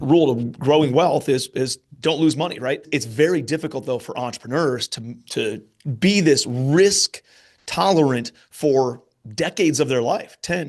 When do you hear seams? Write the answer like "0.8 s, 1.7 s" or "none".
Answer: 2.8 s